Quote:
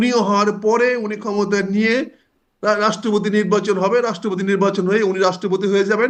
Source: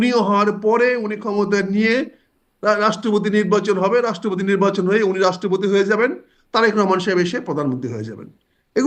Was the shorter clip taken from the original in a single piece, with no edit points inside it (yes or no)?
yes